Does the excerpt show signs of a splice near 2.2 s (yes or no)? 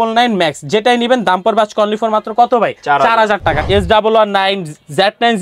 no